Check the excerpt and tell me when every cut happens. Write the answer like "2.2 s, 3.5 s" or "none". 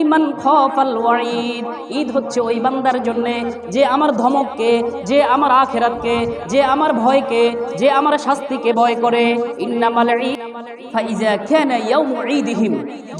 10.4 s